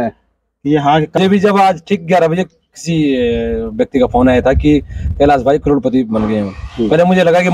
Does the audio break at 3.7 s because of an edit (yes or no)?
no